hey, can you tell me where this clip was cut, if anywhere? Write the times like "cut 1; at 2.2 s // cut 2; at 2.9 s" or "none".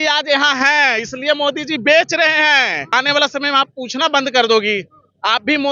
cut 1; at 2.9 s